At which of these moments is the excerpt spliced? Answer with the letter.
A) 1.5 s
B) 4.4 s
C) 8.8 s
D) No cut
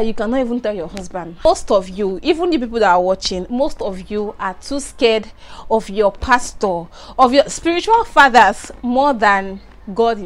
A